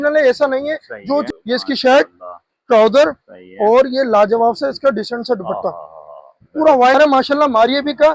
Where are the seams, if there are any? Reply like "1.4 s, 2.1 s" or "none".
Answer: 1.3 s, 7.0 s